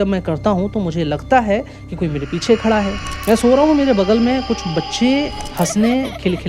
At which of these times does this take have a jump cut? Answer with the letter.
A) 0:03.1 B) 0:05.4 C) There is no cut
A